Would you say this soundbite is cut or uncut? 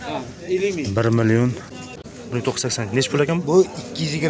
cut